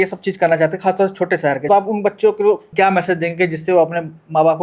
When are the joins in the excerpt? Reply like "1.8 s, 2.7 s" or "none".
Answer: 1.7 s, 2.7 s